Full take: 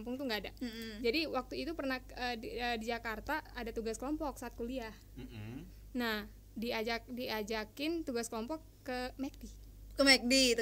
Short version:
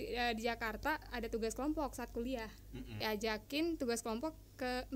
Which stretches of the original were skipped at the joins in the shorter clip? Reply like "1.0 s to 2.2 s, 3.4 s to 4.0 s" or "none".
5.4 s to 7.3 s